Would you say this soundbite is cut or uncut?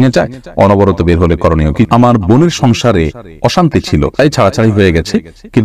cut